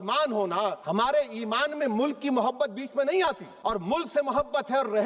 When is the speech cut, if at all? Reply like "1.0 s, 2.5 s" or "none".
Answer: 0.8 s, 3.5 s